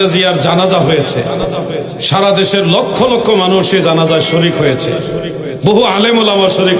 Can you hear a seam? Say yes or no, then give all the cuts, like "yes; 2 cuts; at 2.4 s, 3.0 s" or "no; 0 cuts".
no; 0 cuts